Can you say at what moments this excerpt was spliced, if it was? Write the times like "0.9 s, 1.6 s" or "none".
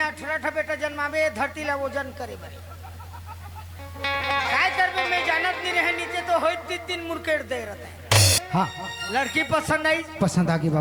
8.4 s